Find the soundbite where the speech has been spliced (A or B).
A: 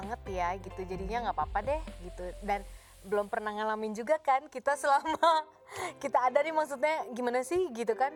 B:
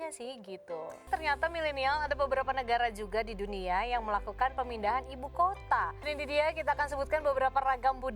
B